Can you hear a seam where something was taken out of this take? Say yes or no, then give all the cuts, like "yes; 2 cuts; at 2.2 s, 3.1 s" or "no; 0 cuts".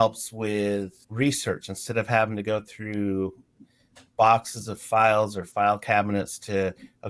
no; 0 cuts